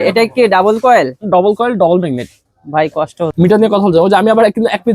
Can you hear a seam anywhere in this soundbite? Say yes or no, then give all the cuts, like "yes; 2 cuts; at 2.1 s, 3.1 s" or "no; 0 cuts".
yes; 1 cut; at 3.3 s